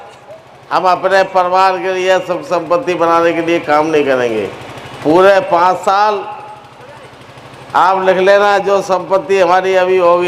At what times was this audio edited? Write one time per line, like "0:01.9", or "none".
none